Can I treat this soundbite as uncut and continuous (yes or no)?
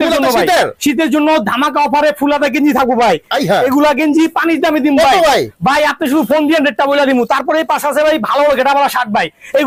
yes